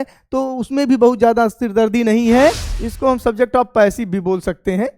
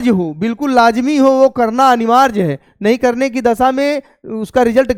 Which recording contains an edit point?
first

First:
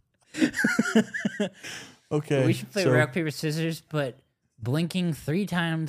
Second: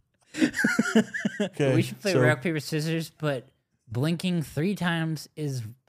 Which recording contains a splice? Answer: second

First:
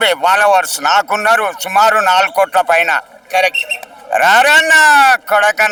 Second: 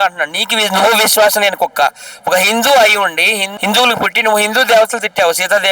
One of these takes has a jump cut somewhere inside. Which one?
second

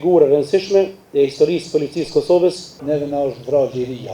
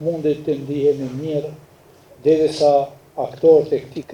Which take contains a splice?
first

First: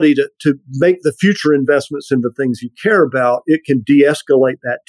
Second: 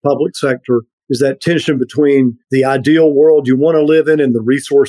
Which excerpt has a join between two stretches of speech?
second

